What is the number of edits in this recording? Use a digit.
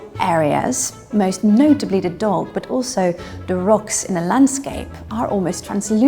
0